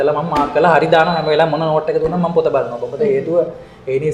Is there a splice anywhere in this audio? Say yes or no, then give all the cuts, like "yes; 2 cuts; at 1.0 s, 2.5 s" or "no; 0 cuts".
no; 0 cuts